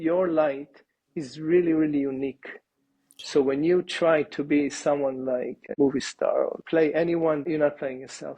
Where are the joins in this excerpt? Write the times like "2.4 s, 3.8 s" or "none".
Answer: 5.6 s, 6.6 s, 7.4 s

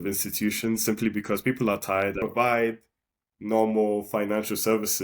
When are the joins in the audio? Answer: 2.2 s

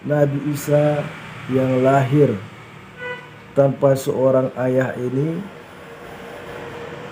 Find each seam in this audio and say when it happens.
none

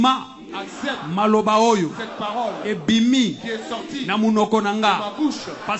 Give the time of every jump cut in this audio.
none

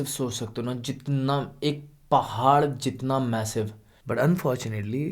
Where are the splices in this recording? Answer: 3.9 s

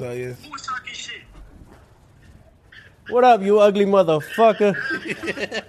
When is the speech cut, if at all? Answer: 1.3 s

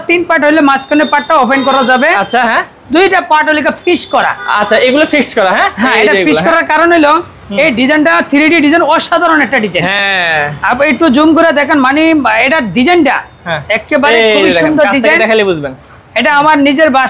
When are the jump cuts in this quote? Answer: none

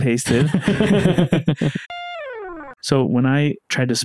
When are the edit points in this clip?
2.2 s

